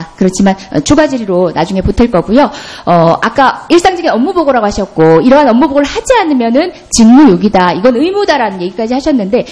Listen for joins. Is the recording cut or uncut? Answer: cut